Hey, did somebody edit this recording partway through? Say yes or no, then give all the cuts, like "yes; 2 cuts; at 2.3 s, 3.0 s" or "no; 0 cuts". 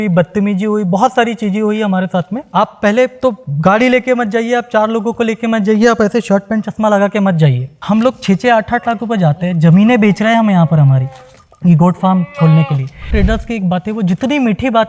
yes; 3 cuts; at 2.4 s, 7.7 s, 13.0 s